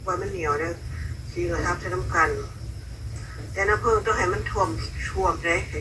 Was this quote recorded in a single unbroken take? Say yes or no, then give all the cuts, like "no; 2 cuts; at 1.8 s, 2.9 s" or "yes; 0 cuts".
yes; 0 cuts